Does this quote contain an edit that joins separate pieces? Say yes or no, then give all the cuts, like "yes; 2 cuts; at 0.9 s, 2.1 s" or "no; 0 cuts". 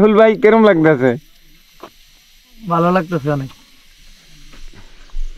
no; 0 cuts